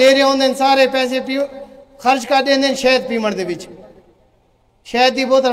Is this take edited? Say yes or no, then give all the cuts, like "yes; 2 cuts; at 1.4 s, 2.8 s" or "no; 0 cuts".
no; 0 cuts